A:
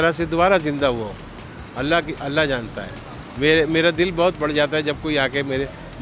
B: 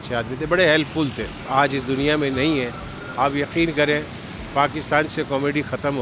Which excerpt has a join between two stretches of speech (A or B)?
B